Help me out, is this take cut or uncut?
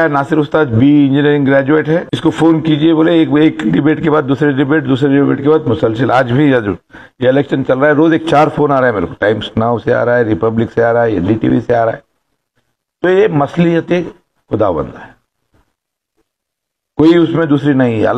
cut